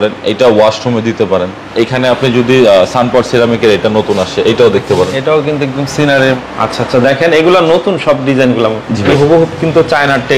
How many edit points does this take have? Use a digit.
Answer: 3